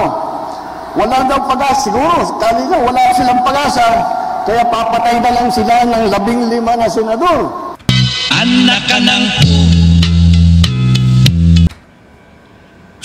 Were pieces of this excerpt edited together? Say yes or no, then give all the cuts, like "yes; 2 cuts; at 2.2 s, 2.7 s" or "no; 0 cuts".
yes; 3 cuts; at 7.8 s, 9.8 s, 10.6 s